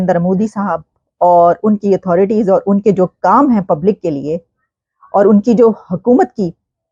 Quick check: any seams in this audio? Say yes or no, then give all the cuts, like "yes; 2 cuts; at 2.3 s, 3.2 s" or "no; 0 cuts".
no; 0 cuts